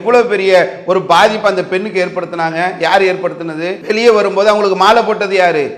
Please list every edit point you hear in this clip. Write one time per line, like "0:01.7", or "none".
0:03.7